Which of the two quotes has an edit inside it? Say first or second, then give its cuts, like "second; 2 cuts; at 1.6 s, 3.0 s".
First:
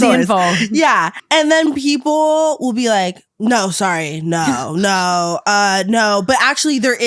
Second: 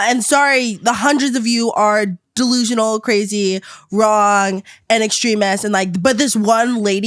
first; 2 cuts; at 1.1 s, 3.2 s